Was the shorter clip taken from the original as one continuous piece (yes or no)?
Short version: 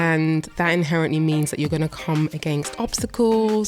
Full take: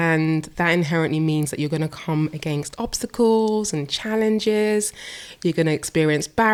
yes